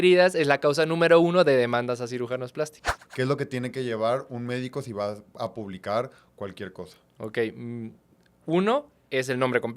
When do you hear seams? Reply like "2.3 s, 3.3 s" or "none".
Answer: 3.0 s

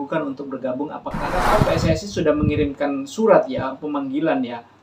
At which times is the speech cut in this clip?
1.4 s

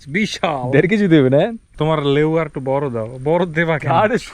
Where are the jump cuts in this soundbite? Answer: 1.6 s

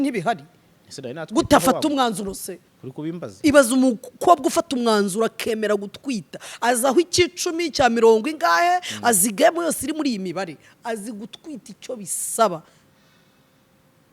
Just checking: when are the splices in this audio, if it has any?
none

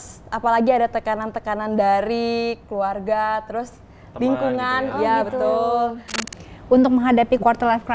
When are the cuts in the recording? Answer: 6.2 s

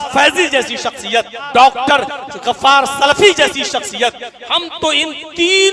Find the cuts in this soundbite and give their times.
1.4 s

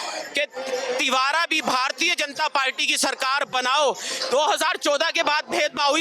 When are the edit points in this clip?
4.3 s

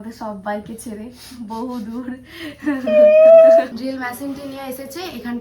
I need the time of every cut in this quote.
3.8 s

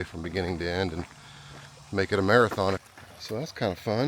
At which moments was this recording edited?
2.8 s

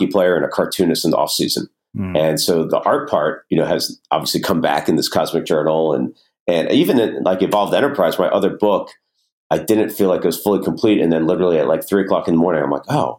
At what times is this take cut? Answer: 2.7 s, 9.3 s

